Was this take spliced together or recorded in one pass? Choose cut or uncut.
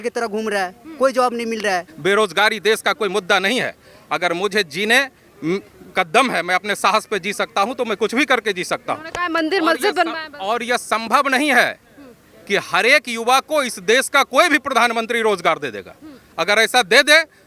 cut